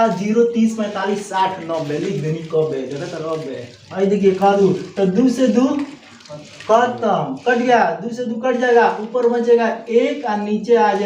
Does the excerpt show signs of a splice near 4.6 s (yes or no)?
yes